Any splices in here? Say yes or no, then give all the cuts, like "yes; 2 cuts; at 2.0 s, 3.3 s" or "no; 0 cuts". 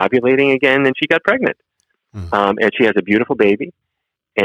no; 0 cuts